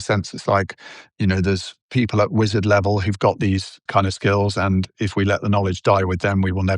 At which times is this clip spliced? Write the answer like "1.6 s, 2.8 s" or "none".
1.7 s, 3.8 s, 4.9 s